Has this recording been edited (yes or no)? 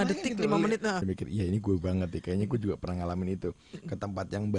yes